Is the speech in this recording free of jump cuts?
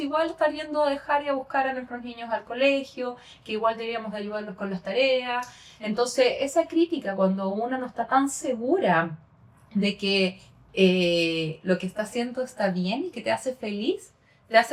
yes; 0 cuts

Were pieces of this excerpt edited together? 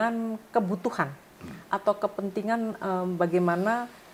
no; 0 cuts

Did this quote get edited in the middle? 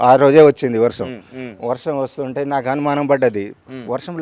no; 0 cuts

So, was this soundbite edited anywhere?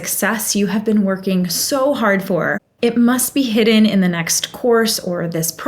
yes; 1 cut; at 2.6 s

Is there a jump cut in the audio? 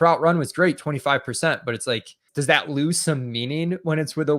yes; 1 cut; at 2.3 s

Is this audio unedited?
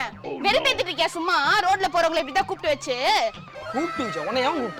yes; 0 cuts

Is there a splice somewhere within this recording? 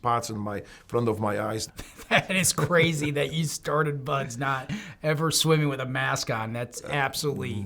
yes; 1 cut; at 1.6 s

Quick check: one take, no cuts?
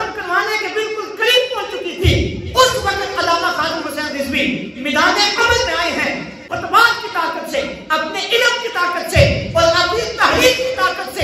no; 1 cut; at 6.4 s

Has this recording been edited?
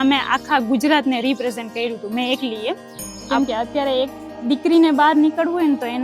yes; 1 cut; at 3.2 s

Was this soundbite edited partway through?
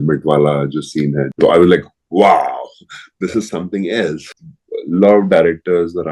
yes; 2 cuts; at 1.3 s, 4.2 s

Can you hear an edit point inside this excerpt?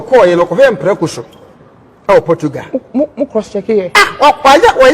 no; 0 cuts

